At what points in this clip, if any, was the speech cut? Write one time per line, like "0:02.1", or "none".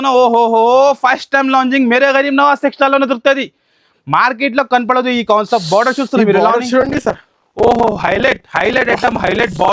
none